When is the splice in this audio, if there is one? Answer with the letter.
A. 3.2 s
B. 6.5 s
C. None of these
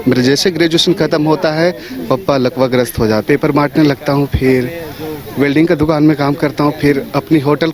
A